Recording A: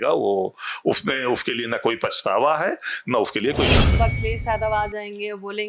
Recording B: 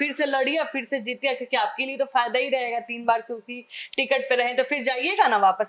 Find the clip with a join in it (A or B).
A